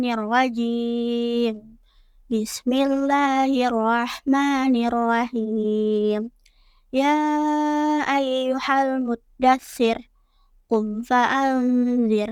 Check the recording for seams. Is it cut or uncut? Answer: uncut